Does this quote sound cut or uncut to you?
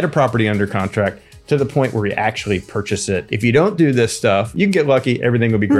cut